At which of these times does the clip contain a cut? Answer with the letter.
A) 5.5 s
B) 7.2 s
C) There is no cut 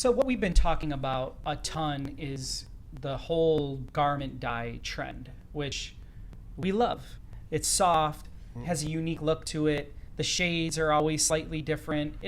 B